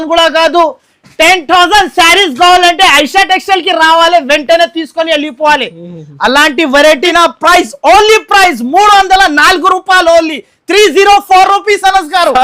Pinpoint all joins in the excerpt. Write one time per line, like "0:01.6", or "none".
0:07.1